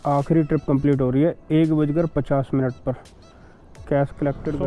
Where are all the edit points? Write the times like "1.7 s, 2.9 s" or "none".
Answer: none